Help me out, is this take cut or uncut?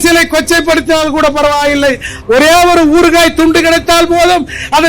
cut